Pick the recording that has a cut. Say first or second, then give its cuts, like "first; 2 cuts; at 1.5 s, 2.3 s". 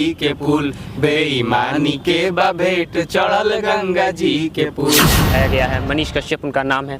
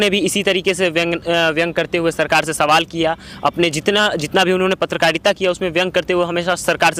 first; 1 cut; at 5.4 s